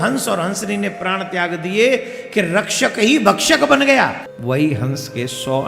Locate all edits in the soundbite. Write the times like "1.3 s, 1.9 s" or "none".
4.3 s